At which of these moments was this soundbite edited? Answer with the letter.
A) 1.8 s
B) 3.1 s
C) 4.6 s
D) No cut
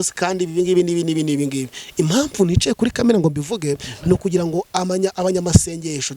A